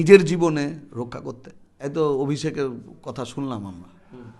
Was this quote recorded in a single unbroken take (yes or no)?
no